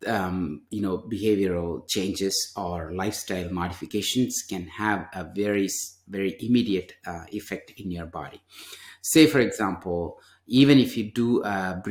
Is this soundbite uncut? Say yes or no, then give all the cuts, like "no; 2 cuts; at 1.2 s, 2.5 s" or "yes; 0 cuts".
yes; 0 cuts